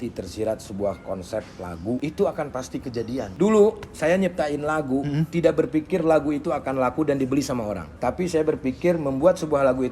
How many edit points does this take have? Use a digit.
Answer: 3